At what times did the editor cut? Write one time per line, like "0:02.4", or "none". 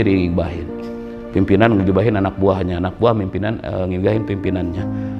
none